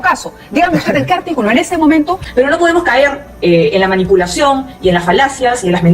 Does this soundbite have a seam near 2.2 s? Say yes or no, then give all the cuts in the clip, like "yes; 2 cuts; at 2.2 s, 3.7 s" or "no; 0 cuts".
yes; 1 cut; at 2.2 s